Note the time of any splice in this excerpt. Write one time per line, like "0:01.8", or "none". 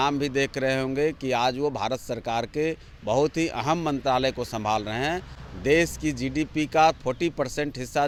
none